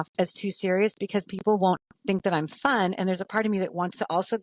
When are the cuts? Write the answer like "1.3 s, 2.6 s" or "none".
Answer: none

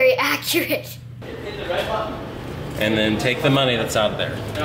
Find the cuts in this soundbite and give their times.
1.1 s

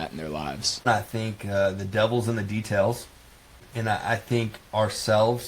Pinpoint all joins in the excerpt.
0.9 s, 3.7 s

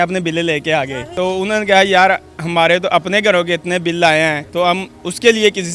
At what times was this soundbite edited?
1.1 s, 4.4 s

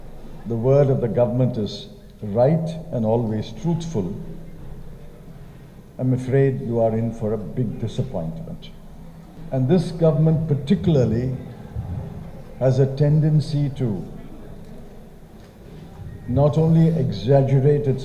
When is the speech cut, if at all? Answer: 9.3 s

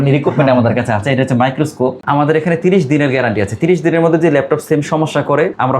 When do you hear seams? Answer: 2.0 s

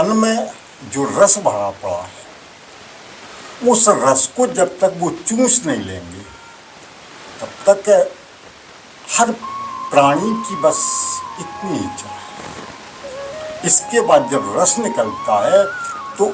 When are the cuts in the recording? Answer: none

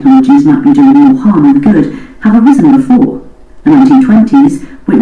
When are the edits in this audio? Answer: 2.0 s

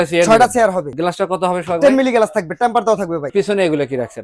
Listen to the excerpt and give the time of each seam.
0.9 s, 3.3 s

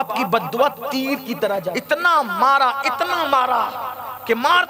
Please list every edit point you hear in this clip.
1.7 s

